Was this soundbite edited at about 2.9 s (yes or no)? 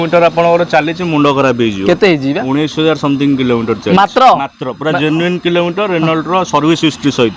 no